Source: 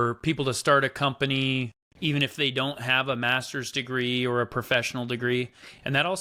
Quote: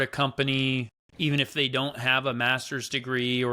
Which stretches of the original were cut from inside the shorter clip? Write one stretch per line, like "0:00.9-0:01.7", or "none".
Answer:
none

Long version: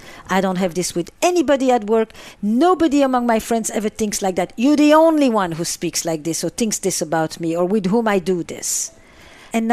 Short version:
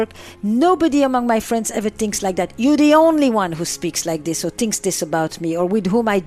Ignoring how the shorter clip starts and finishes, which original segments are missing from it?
none

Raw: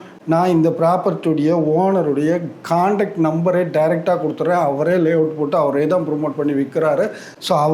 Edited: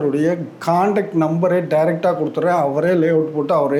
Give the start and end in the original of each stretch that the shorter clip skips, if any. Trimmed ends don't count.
none

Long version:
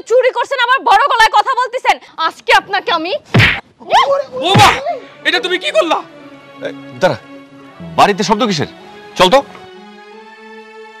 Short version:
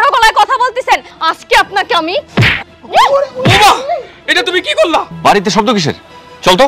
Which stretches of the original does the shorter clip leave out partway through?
0:06.1-0:07.8

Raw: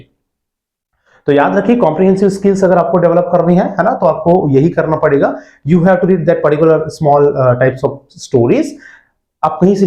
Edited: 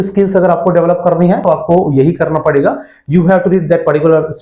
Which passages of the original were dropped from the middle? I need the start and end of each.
0:03.7-0:04.0

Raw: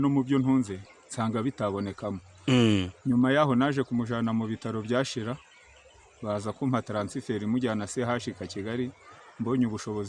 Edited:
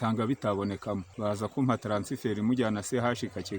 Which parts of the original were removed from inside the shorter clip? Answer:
0:02.3-0:06.1

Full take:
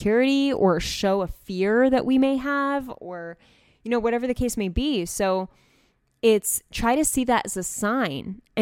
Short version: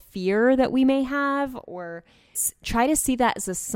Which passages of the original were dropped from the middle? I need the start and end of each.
0:03.8-0:06.5

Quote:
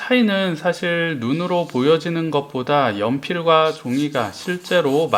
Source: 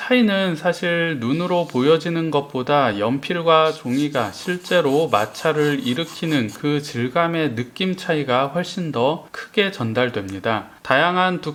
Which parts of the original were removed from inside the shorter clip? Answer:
none

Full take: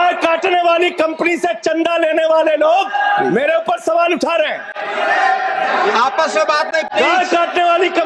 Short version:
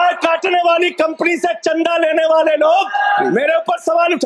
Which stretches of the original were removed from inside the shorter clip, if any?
none

